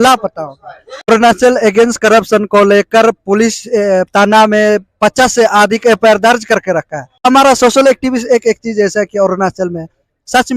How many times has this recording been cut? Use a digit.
2